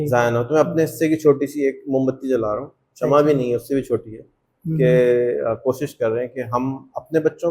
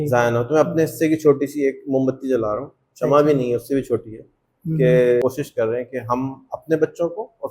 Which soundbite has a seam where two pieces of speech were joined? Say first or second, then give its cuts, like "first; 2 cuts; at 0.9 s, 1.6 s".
second; 1 cut; at 5.2 s